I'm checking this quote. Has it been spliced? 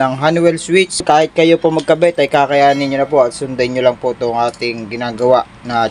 yes; 1 cut; at 1.0 s

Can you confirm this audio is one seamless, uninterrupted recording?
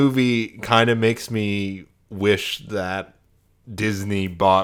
yes; 0 cuts

